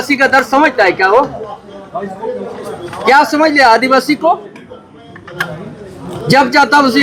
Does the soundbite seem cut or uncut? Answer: uncut